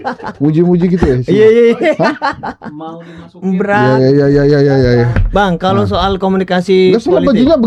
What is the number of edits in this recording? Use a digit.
0